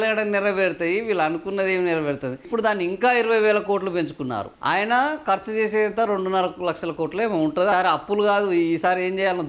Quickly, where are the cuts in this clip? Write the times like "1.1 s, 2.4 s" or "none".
2.4 s, 7.7 s

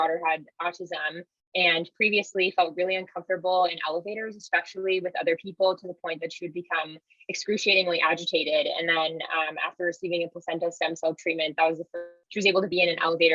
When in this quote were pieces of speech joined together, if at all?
12.2 s

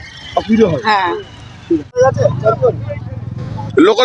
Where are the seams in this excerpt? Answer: 2.0 s

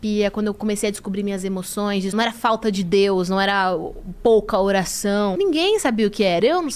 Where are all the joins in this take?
2.1 s, 5.3 s

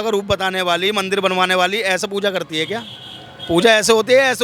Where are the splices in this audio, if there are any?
none

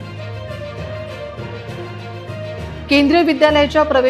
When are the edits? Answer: 1.1 s, 1.7 s

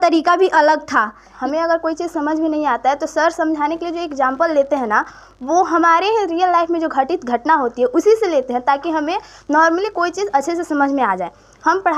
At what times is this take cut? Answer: 1.3 s

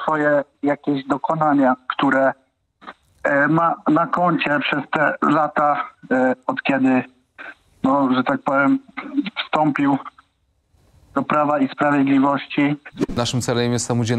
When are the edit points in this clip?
13.2 s

